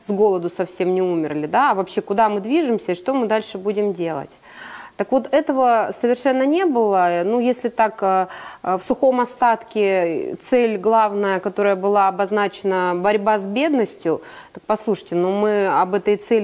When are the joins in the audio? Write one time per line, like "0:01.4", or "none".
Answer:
none